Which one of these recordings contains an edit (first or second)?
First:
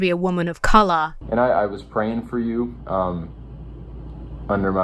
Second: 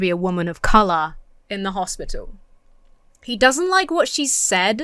first